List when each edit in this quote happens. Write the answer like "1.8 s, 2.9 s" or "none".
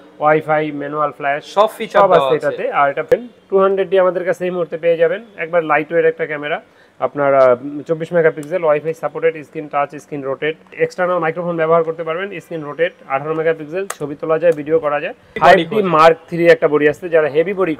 3.1 s, 10.7 s, 15.3 s